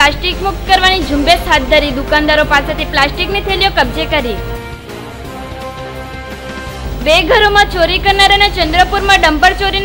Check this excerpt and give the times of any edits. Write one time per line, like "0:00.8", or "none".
none